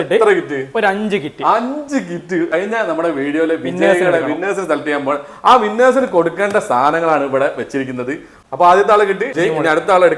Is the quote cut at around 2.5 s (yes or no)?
yes